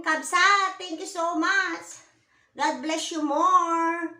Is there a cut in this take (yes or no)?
no